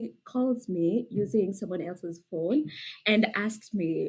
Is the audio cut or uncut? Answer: uncut